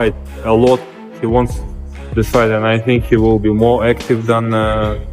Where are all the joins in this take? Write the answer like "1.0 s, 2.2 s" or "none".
none